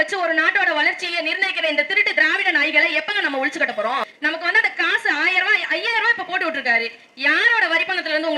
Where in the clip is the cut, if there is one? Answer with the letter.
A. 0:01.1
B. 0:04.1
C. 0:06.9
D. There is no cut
B